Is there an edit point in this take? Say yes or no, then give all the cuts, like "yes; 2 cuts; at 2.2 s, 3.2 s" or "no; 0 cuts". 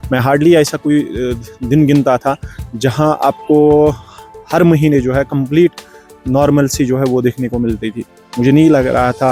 no; 0 cuts